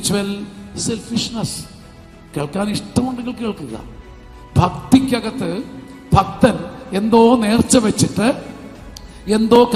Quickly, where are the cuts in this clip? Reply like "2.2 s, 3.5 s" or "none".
none